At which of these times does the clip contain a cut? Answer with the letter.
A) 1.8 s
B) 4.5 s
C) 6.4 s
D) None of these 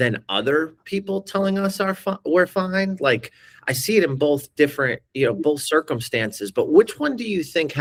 D